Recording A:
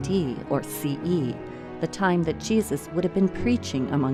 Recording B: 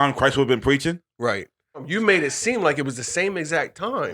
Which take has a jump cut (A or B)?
B